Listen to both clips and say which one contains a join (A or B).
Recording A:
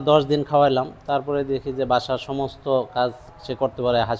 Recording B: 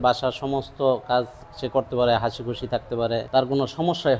B